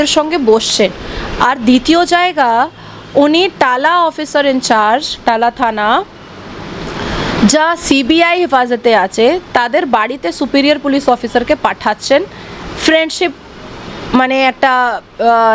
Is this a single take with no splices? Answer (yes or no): yes